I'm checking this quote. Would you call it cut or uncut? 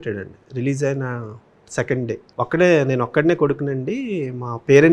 cut